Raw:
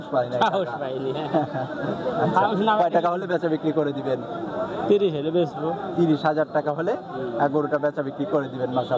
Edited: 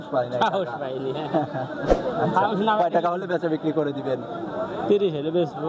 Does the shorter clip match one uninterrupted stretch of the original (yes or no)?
yes